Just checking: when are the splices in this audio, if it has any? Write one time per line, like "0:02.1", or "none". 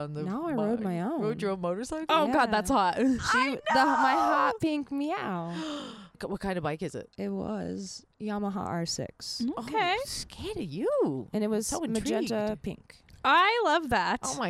0:06.2
0:08.1